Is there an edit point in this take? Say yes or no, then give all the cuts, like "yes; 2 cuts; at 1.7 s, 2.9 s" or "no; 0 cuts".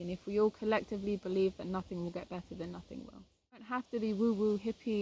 yes; 1 cut; at 3.8 s